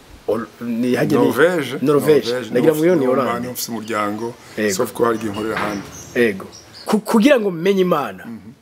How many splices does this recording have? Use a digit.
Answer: 1